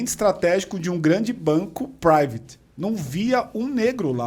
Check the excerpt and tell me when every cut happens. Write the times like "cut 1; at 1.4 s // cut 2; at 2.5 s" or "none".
none